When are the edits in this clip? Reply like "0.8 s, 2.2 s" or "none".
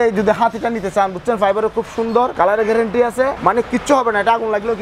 2.3 s, 3.4 s